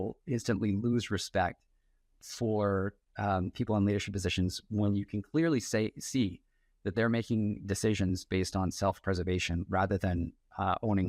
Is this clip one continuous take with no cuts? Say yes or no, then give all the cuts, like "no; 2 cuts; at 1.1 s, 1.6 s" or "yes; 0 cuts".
yes; 0 cuts